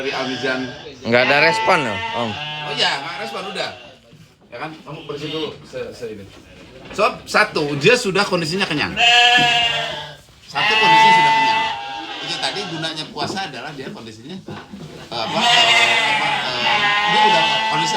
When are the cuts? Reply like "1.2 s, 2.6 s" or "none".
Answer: none